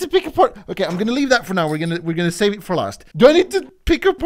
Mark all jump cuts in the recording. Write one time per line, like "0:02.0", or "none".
0:03.0